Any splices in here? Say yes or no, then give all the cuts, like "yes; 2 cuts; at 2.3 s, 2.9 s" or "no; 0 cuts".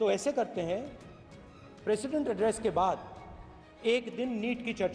no; 0 cuts